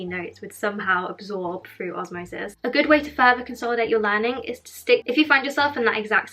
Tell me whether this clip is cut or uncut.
cut